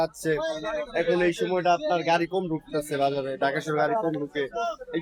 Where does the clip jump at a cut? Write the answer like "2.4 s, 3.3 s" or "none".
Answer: none